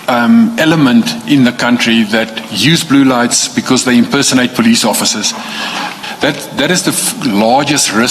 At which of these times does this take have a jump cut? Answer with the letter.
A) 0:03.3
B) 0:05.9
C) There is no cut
B